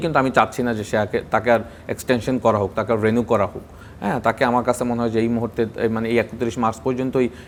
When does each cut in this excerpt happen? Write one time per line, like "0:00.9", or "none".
none

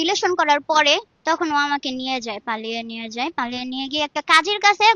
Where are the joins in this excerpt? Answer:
0:01.1

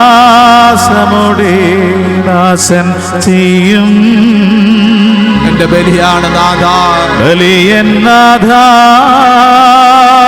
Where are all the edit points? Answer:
none

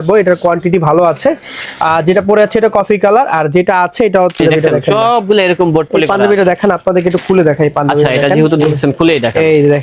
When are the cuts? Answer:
0:04.3

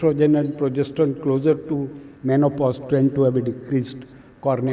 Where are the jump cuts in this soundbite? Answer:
none

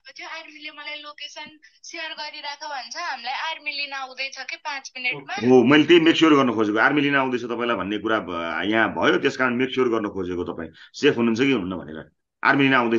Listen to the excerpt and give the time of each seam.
none

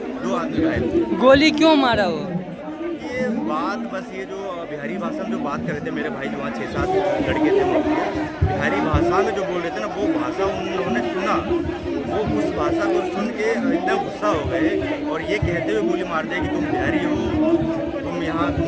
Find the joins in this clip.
none

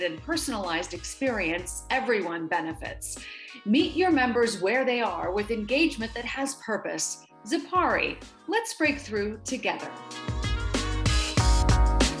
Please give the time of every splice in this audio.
0:10.0

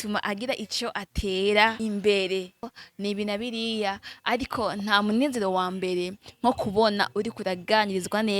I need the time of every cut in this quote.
0:01.8
0:02.7

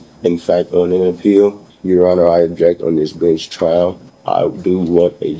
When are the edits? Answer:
0:01.7
0:04.1

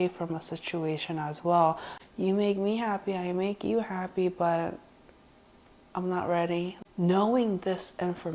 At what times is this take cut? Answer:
0:01.9
0:06.8

